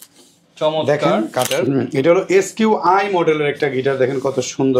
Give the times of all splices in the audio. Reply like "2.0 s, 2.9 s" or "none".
1.5 s